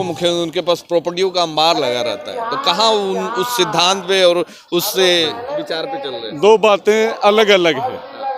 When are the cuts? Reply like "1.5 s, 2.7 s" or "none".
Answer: none